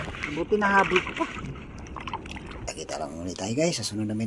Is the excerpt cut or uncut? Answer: cut